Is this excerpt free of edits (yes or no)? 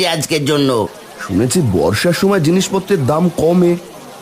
no